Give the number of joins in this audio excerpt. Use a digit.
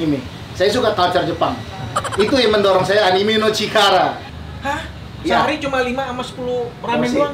1